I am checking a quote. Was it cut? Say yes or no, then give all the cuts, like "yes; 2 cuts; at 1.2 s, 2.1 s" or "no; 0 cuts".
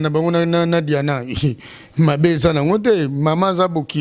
no; 0 cuts